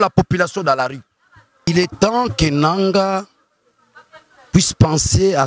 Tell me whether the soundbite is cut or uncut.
cut